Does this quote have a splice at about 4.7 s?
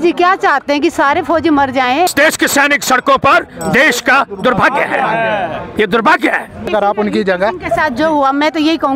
no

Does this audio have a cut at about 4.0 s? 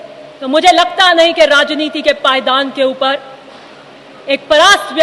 no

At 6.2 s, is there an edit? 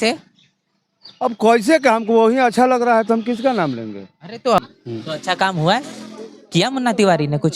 no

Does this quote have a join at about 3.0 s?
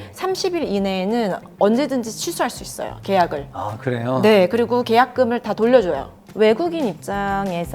no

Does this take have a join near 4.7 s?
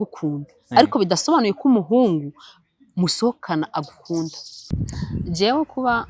yes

